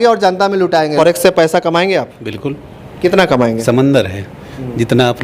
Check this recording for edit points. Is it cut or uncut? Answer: cut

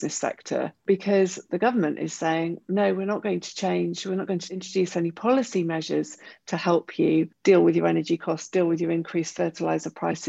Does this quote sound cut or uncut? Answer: cut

